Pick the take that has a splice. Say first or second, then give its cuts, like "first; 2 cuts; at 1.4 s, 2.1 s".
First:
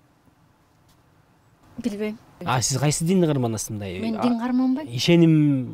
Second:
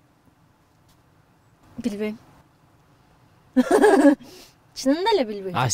first; 1 cut; at 2.4 s